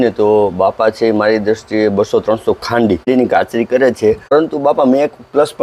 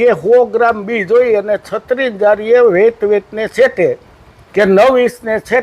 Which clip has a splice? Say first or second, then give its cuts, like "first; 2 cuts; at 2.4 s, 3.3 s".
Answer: first; 2 cuts; at 3.1 s, 4.3 s